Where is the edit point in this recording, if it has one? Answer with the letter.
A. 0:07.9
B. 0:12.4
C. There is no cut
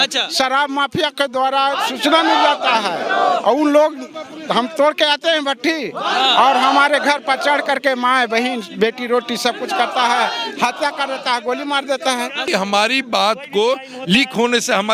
B